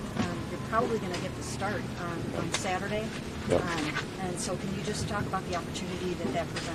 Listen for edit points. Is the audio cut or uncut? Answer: uncut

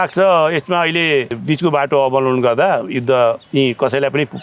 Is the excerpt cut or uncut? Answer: cut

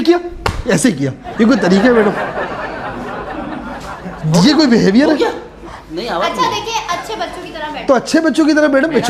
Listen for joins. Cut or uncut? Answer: uncut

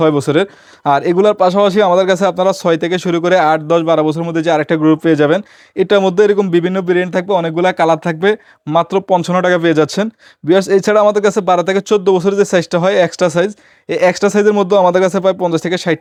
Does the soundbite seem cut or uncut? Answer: uncut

